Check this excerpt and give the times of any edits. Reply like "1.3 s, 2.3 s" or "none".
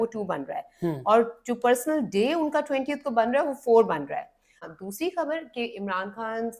4.5 s